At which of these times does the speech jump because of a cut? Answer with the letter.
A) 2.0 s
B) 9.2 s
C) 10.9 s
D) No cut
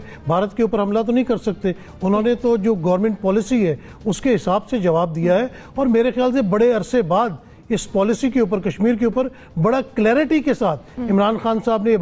D